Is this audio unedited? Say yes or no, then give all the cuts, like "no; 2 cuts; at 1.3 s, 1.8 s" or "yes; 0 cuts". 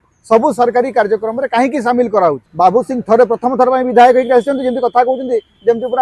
no; 1 cut; at 2.4 s